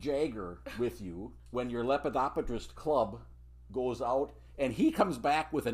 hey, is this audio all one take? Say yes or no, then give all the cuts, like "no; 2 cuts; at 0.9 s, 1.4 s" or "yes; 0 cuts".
yes; 0 cuts